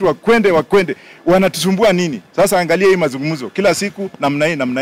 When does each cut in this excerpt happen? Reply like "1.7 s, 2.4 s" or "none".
none

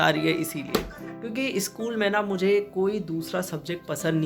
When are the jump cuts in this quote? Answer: none

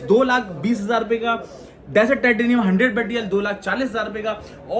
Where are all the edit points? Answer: none

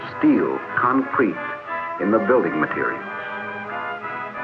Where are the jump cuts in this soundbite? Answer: none

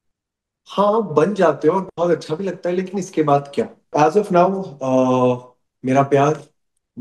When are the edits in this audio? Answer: 3.9 s

